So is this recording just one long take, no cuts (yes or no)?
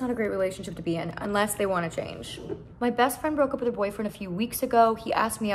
yes